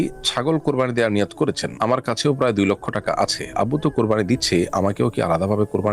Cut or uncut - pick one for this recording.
uncut